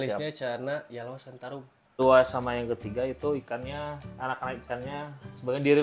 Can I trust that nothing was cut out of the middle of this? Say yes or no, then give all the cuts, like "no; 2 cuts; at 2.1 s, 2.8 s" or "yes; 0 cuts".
no; 1 cut; at 2.0 s